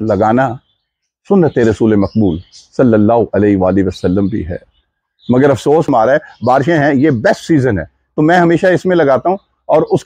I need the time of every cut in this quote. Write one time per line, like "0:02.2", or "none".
0:05.9